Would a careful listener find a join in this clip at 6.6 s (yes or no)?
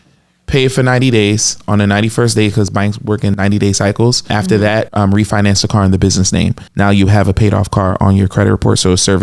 yes